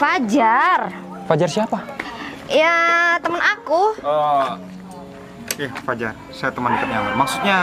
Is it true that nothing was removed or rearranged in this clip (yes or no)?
yes